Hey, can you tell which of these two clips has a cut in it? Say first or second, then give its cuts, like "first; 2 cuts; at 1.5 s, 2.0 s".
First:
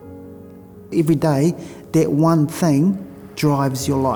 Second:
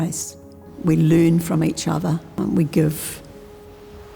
second; 1 cut; at 2.3 s